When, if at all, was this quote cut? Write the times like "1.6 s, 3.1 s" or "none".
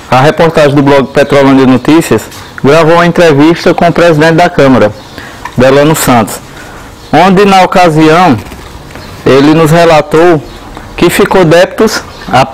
none